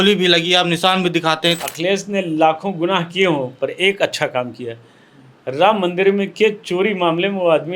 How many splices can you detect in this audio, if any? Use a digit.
1